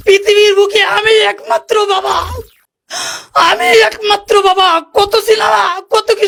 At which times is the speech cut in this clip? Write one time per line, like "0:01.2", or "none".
none